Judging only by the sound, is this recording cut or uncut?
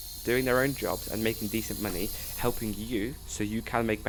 uncut